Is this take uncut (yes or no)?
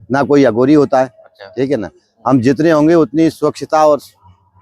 yes